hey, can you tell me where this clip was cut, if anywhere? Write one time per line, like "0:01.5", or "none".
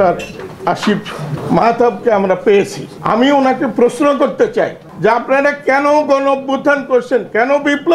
0:01.4
0:02.9
0:04.8